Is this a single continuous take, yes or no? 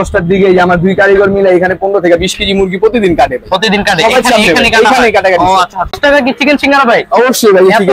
no